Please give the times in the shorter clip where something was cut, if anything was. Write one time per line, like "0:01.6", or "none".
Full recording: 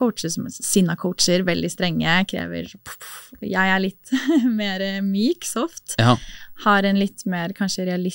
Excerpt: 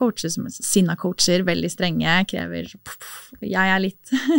none